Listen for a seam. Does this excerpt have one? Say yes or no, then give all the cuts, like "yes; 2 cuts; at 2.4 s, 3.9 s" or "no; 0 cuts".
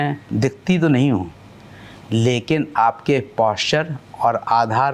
no; 0 cuts